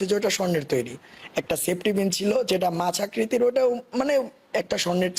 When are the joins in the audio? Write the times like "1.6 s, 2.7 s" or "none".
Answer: none